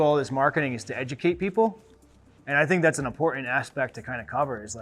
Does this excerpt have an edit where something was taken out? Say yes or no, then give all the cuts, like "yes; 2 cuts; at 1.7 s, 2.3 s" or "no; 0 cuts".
no; 0 cuts